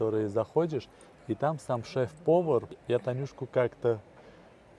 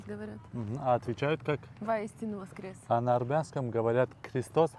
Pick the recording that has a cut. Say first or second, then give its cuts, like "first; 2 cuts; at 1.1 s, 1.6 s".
first; 1 cut; at 2.7 s